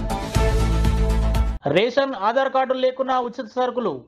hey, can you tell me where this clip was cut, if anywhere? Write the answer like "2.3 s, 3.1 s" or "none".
1.5 s